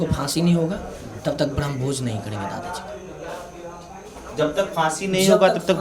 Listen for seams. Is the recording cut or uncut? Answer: uncut